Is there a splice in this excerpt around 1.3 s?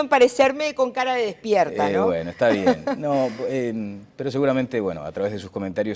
no; 1 cut; at 3.9 s

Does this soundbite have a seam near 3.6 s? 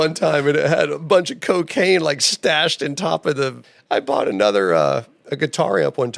yes; 1 cut; at 3.6 s

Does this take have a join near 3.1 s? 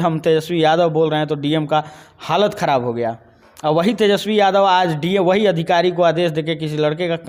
no; 0 cuts

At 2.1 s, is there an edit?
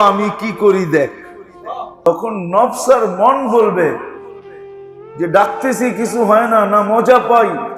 yes; 1 cut; at 2.1 s

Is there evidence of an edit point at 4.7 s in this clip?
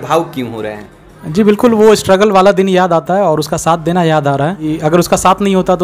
yes; 1 cut; at 4.7 s

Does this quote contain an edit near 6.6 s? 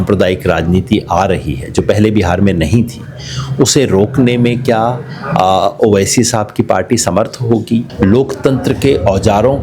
no; 1 cut; at 7.9 s

